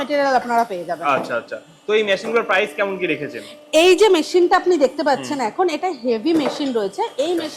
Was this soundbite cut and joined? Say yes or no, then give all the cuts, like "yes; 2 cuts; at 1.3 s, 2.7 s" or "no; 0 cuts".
no; 0 cuts